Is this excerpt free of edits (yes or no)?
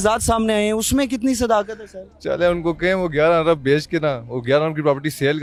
yes